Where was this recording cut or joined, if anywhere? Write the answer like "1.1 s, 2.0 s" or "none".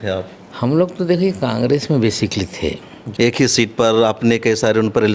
3.0 s

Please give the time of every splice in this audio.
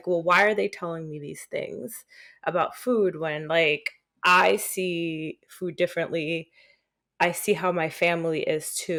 none

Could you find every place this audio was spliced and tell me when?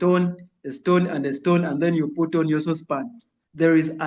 3.1 s

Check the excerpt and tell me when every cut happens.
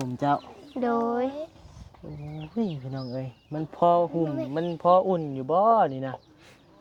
none

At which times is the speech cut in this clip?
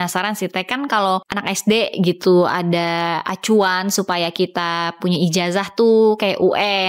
1.3 s

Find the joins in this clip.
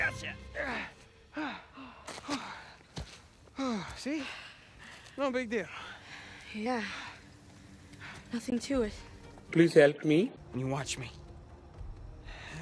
10.4 s

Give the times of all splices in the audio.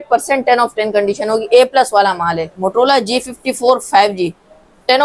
2.5 s

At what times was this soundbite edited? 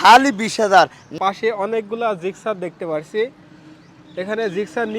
1.0 s

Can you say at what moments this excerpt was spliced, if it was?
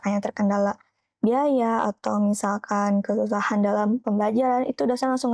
none

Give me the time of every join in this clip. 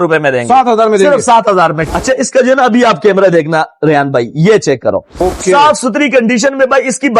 1.8 s, 5.1 s

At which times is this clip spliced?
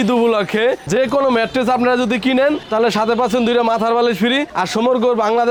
none

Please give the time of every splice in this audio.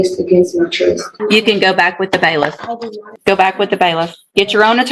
1.1 s, 3.1 s

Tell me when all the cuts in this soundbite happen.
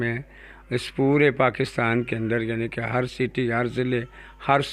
none

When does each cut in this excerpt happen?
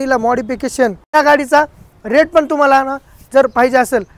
1.1 s

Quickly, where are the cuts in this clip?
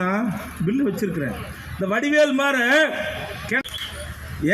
3.6 s

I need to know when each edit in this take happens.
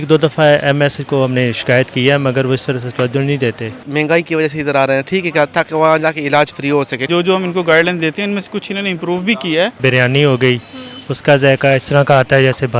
3.8 s, 7.1 s, 9.8 s

